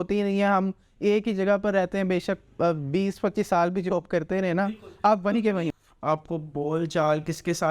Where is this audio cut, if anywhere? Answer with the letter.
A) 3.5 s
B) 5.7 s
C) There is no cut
B